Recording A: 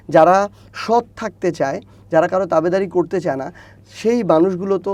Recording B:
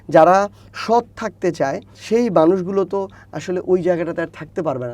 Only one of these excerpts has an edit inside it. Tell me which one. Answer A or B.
B